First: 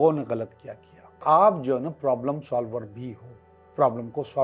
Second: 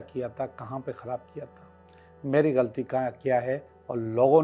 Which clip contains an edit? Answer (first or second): first